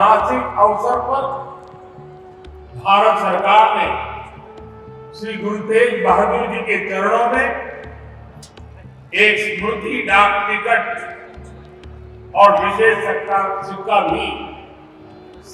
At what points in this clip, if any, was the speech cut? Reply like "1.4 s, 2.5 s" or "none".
none